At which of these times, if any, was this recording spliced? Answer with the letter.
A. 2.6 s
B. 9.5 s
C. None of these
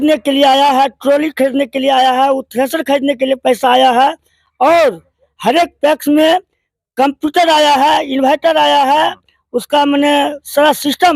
C